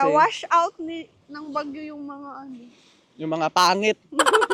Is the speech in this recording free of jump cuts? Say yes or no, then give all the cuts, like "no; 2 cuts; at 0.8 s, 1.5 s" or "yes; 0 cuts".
yes; 0 cuts